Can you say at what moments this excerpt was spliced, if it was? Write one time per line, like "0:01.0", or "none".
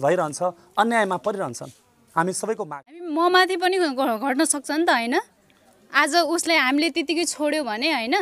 0:03.1